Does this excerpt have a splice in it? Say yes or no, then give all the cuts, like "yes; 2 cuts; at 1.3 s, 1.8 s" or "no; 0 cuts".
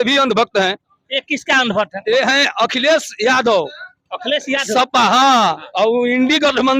no; 0 cuts